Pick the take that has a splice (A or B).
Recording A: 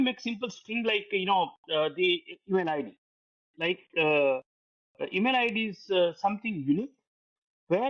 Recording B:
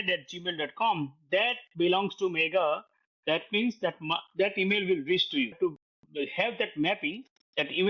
B